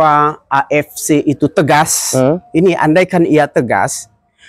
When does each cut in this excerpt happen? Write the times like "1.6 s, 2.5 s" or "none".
none